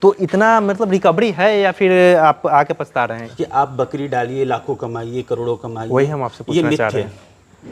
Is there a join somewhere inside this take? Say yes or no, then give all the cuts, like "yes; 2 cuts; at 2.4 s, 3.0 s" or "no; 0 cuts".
yes; 1 cut; at 3.2 s